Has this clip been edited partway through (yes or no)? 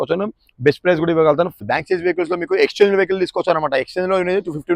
yes